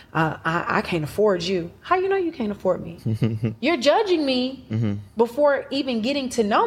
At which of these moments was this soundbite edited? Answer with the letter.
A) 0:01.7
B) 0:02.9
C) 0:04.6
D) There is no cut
B